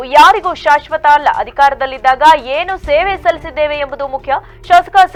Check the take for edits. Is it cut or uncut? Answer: uncut